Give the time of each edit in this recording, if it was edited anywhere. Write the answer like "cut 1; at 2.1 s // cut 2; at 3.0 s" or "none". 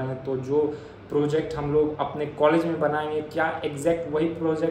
none